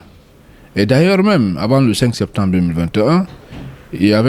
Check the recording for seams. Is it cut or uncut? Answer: uncut